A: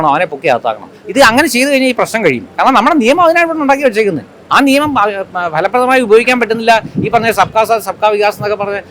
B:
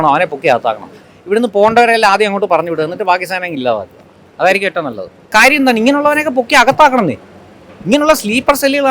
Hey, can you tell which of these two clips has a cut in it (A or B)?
B